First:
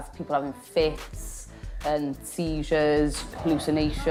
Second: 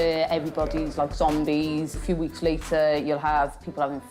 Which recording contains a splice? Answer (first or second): second